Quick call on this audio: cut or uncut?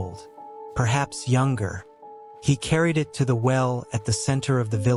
uncut